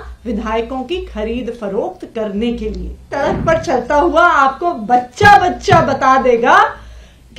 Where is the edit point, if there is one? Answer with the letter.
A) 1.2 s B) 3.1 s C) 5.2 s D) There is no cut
B